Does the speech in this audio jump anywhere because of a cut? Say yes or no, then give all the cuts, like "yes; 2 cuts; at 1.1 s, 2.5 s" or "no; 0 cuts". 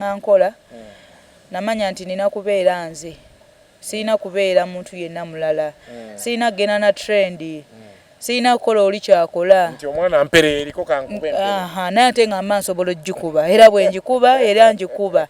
no; 0 cuts